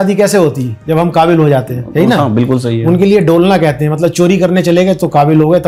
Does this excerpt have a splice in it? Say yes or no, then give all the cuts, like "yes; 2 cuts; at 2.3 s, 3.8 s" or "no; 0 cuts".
no; 0 cuts